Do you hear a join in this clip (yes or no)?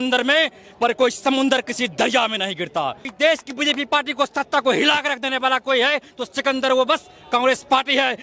yes